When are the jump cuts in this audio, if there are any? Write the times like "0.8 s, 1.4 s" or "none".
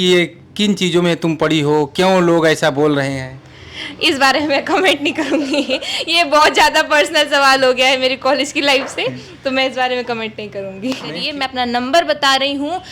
11.2 s